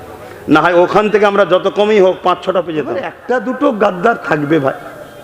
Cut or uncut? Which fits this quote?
cut